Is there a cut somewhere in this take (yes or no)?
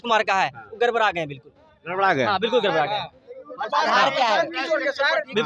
no